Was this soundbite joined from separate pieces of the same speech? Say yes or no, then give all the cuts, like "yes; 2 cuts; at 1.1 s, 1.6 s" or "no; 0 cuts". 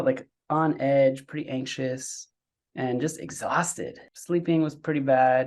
yes; 1 cut; at 4.0 s